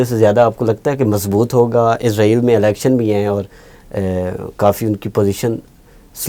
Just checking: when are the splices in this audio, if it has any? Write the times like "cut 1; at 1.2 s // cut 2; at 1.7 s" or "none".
none